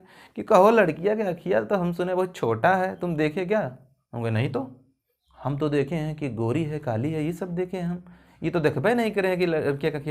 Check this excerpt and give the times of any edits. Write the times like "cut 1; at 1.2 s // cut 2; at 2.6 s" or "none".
none